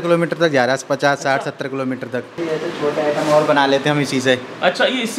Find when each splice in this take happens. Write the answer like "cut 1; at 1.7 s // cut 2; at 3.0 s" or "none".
cut 1; at 2.3 s